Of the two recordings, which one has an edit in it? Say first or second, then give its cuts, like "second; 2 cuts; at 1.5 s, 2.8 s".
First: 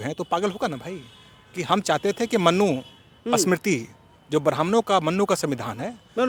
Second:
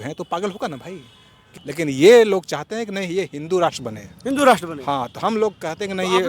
second; 1 cut; at 1.6 s